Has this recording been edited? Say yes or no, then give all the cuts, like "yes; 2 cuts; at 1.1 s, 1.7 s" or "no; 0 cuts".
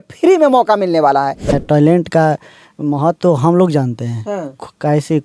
yes; 1 cut; at 1.4 s